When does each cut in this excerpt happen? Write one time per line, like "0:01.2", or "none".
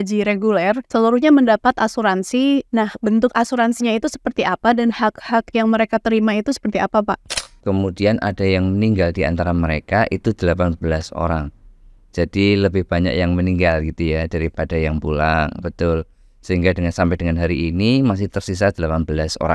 0:00.8
0:02.7
0:07.3